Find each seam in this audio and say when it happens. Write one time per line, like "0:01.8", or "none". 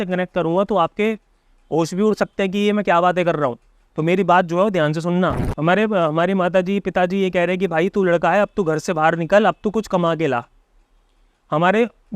0:05.5